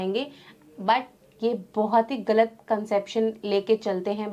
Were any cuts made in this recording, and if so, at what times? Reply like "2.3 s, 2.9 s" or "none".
none